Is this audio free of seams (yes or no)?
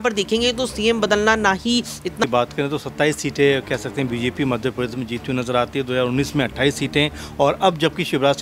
no